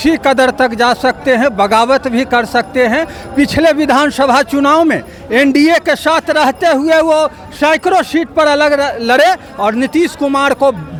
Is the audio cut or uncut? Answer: uncut